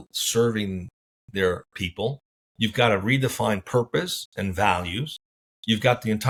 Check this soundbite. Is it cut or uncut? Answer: uncut